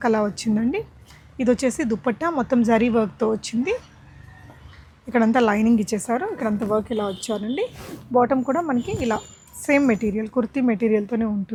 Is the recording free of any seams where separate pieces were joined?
yes; 0 cuts

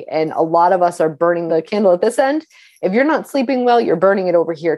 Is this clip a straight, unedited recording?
no; 1 cut; at 1.5 s

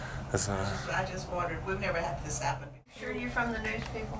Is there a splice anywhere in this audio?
yes; 1 cut; at 2.9 s

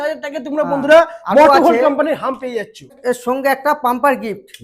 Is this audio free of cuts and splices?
no; 1 cut; at 2.9 s

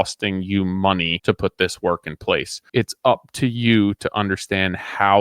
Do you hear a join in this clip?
yes; 2 cuts; at 1.1 s, 2.6 s

